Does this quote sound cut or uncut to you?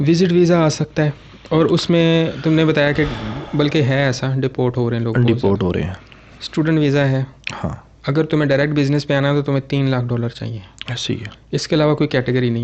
uncut